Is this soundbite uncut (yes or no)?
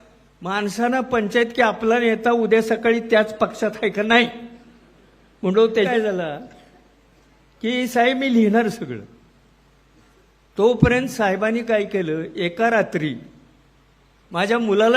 no